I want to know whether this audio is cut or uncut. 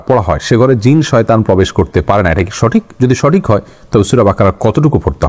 uncut